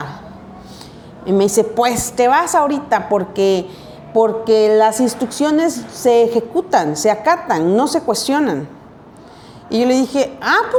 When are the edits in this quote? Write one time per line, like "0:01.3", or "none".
none